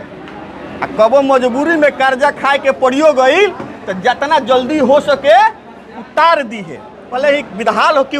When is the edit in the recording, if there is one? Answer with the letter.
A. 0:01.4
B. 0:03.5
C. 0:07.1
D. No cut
C